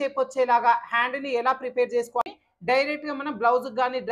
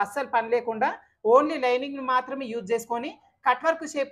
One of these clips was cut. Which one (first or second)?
first